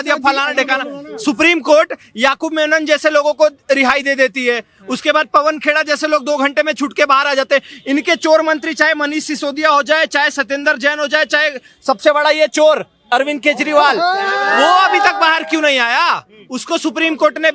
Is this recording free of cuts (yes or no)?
yes